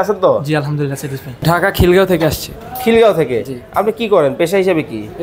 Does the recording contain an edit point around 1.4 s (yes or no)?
yes